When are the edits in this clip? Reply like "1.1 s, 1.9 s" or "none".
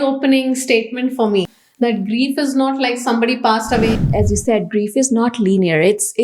1.6 s, 3.9 s